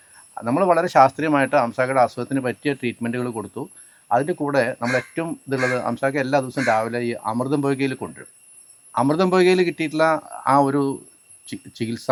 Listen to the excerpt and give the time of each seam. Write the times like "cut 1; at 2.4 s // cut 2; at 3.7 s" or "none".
none